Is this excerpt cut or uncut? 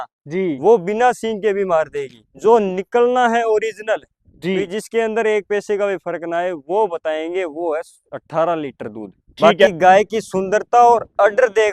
cut